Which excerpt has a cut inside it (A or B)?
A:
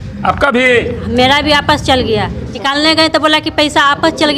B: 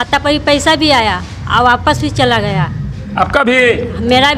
A